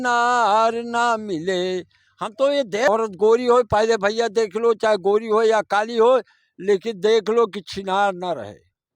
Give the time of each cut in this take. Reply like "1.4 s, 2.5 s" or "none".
2.9 s